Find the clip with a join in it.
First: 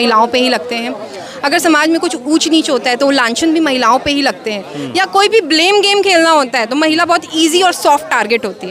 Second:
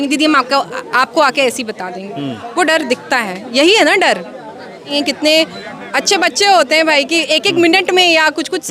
second; 1 cut; at 4.9 s

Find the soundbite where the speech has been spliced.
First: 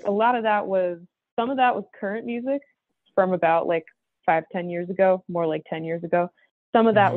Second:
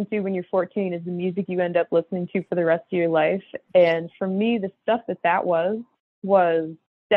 first; 1 cut; at 2.9 s

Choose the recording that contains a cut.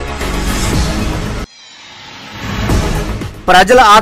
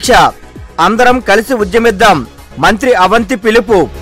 first; 2 cuts; at 1.2 s, 2.9 s

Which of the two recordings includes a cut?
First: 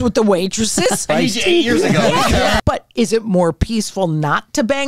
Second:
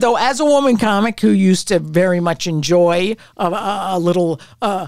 first; 2 cuts; at 1.1 s, 2.6 s

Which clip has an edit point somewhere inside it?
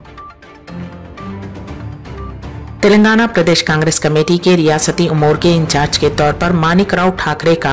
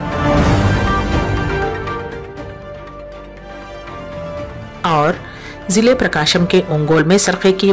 first; 2 cuts; at 1.9 s, 2.7 s

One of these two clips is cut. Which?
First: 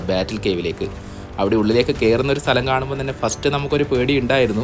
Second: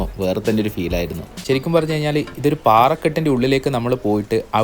second; 1 cut; at 1.3 s

